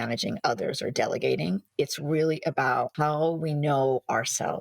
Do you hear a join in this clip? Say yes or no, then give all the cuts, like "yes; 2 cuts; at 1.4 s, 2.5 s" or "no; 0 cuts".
yes; 1 cut; at 2.9 s